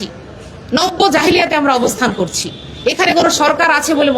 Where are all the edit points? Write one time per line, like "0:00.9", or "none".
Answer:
none